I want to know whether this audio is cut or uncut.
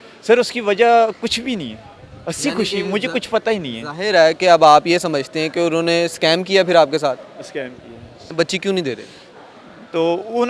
cut